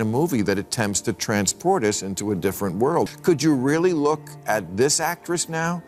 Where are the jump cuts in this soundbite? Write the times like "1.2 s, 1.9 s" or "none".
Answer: 3.2 s